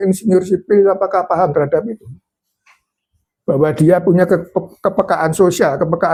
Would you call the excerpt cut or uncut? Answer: uncut